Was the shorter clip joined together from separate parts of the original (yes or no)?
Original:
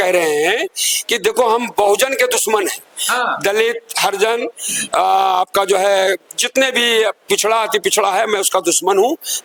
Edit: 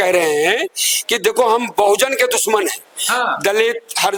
no